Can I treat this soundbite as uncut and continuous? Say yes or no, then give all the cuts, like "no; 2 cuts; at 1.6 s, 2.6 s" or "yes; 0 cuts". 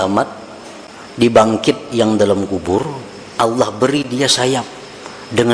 yes; 0 cuts